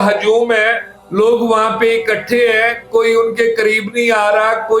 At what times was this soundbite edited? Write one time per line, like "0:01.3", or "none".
none